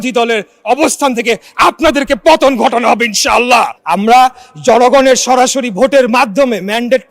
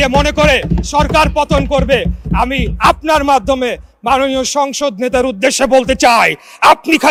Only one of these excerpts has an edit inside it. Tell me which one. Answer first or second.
first